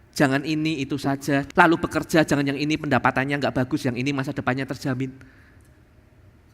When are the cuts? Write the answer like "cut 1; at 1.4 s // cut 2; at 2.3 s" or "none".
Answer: cut 1; at 1.5 s